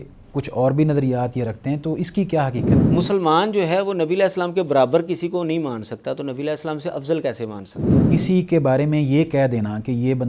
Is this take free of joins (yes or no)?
no